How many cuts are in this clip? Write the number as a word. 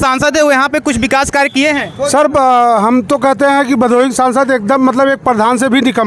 zero